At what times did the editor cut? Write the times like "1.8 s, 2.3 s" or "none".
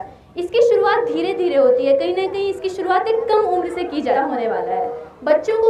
4.2 s